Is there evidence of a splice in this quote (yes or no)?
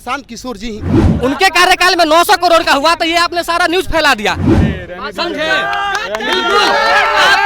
yes